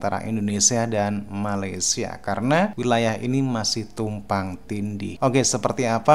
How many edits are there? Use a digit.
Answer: 2